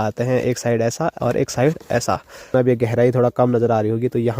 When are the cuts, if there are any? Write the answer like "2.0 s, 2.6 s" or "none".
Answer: 2.5 s